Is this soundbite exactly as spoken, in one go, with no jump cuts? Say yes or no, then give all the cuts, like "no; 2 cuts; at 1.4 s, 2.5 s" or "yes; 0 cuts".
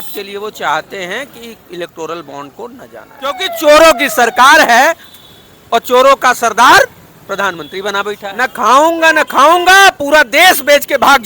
no; 2 cuts; at 3.4 s, 8.3 s